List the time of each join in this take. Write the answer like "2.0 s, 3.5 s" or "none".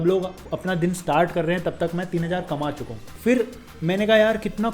3.1 s